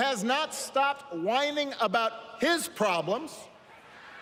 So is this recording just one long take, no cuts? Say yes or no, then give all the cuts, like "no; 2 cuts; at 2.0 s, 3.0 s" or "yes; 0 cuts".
yes; 0 cuts